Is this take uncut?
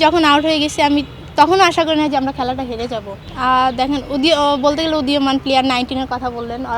no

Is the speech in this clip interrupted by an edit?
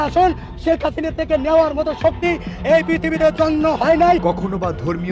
no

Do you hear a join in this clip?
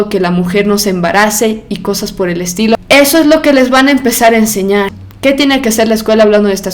yes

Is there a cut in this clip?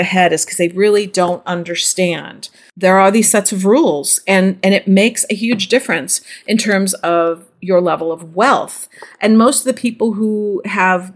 no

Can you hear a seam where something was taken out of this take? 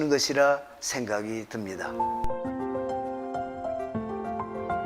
yes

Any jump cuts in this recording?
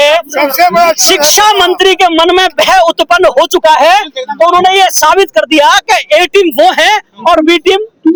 no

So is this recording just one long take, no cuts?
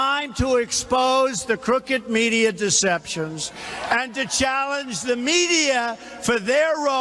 yes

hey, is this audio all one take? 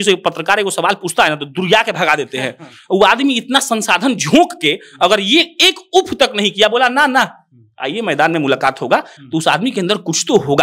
yes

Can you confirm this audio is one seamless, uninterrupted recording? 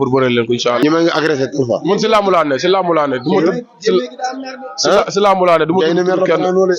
yes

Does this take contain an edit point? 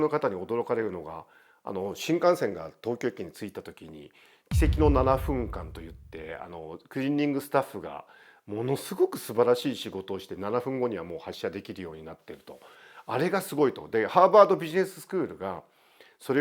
no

